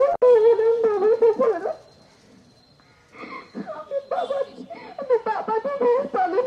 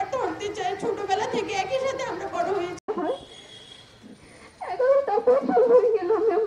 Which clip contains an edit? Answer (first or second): second